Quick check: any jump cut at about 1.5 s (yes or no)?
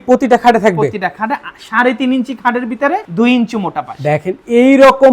no